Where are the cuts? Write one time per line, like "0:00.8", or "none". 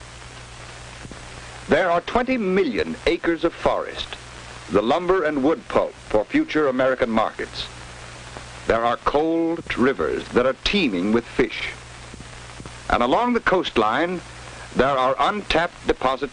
0:02.1